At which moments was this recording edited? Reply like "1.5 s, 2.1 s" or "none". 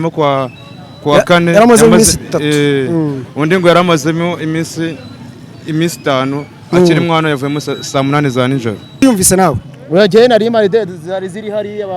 9.0 s